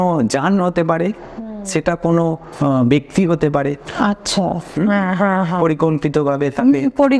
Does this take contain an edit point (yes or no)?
no